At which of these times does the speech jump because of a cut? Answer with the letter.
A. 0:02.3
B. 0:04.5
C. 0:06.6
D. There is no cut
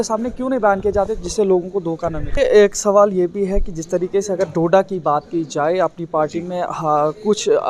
A